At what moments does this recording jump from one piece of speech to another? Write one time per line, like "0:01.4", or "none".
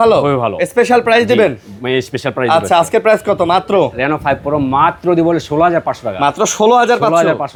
none